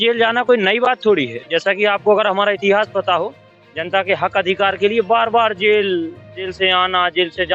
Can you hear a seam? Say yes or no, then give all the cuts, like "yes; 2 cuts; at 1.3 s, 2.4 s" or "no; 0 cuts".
no; 0 cuts